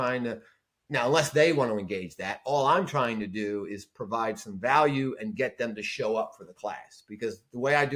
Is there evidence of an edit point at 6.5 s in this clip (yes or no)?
no